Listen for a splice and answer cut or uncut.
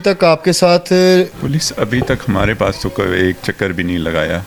cut